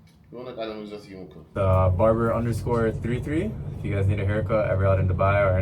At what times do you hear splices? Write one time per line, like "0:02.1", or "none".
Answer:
0:01.4